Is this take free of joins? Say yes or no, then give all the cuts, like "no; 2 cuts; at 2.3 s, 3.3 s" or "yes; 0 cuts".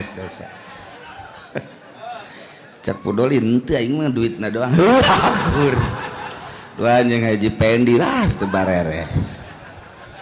yes; 0 cuts